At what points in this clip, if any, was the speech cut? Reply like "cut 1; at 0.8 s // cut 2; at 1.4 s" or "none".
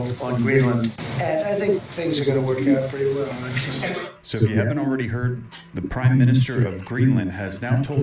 cut 1; at 3.6 s